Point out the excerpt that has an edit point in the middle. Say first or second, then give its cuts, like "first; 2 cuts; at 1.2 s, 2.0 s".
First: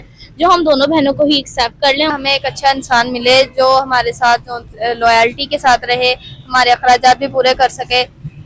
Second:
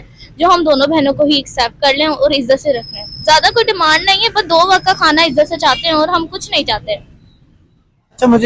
first; 1 cut; at 2.1 s